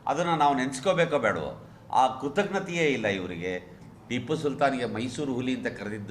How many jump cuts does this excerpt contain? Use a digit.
1